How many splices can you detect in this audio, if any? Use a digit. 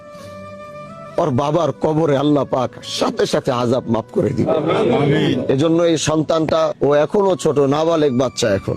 1